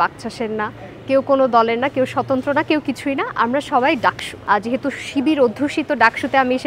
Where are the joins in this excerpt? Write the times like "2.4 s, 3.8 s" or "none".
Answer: 4.3 s